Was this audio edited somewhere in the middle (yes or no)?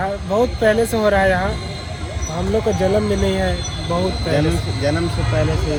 no